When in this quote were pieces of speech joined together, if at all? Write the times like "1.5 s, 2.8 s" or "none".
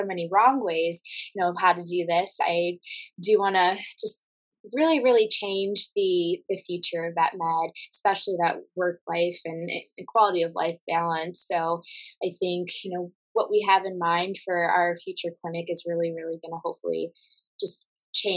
none